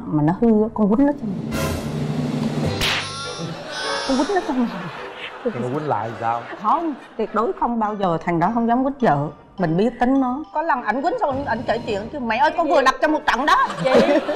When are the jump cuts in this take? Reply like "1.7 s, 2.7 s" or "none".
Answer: none